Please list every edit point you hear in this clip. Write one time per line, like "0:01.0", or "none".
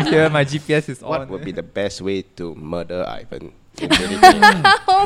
0:01.0